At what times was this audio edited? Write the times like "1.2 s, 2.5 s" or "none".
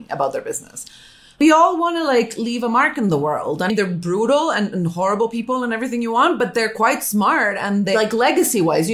1.4 s, 3.7 s, 7.9 s